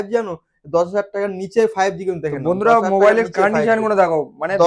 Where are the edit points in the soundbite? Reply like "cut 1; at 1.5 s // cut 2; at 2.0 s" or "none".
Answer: none